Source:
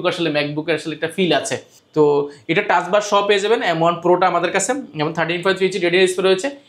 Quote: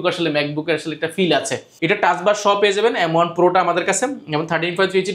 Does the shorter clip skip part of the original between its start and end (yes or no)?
yes